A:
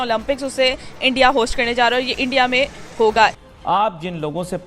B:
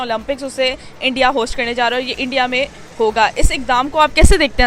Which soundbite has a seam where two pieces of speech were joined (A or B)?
A